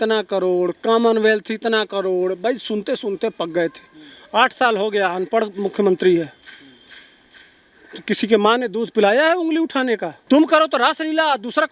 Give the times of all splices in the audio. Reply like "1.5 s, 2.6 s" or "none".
10.1 s